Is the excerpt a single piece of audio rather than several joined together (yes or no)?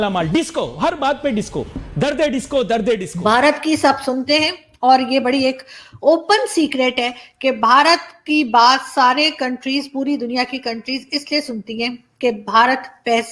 no